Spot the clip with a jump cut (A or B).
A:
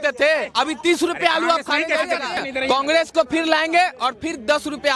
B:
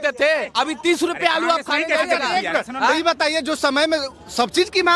A